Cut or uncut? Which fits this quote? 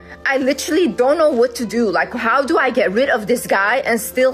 uncut